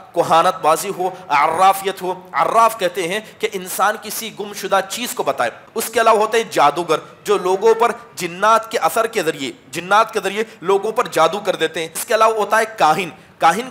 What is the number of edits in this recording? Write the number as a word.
two